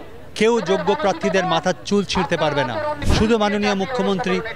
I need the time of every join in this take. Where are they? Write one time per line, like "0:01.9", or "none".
0:03.0